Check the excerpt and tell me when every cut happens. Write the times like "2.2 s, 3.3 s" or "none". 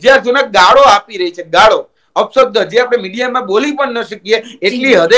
none